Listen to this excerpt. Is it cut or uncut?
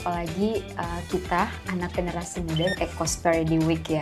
cut